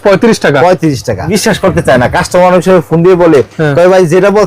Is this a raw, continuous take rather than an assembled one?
no; 1 cut; at 1.3 s

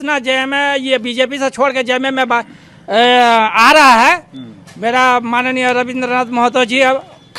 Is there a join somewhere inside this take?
no; 0 cuts

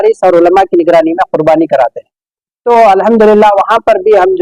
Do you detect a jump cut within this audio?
no; 0 cuts

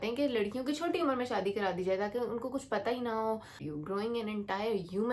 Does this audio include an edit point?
yes; 1 cut; at 3.6 s

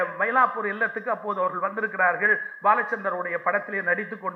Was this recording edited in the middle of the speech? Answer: no; 0 cuts

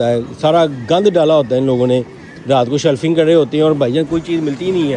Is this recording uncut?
yes; 0 cuts

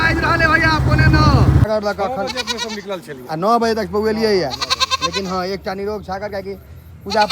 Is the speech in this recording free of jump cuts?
no; 1 cut; at 1.7 s

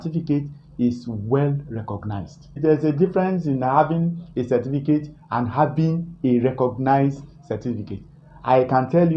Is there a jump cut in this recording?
yes; 1 cut; at 2.6 s

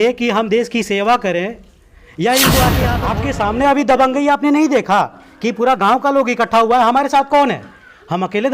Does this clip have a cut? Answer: yes; 1 cut; at 3.0 s

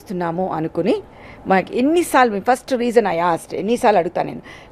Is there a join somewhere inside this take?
no; 0 cuts

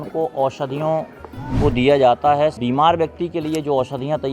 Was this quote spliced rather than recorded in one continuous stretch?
yes; 1 cut; at 2.6 s

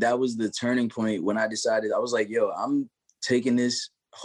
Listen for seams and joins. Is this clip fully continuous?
yes; 0 cuts

